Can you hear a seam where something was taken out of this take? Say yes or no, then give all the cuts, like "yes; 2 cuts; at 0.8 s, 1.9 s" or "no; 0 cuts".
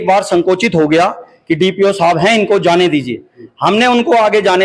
no; 0 cuts